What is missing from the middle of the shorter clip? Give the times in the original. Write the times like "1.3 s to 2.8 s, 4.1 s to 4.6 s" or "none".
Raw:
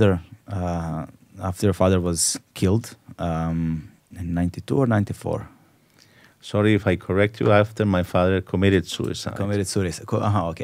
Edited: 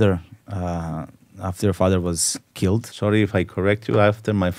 2.9 s to 6.4 s